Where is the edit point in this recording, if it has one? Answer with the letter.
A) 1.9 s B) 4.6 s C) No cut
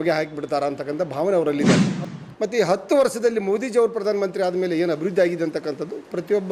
A